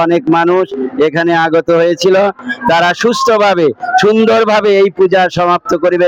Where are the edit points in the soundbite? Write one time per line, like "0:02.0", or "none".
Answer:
none